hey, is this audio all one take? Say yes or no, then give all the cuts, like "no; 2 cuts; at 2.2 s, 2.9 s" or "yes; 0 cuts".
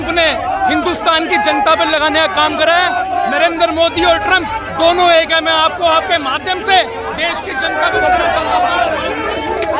yes; 0 cuts